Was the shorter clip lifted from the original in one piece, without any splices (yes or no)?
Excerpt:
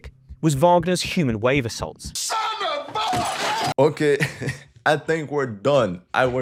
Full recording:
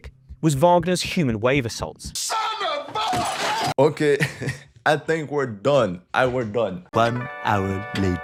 yes